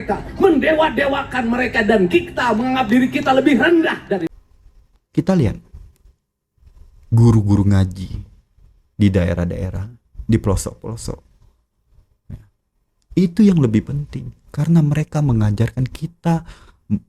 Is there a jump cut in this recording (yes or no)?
yes